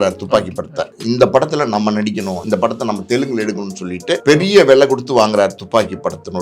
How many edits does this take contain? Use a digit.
3